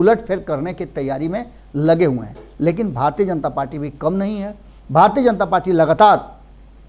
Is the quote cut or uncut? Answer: uncut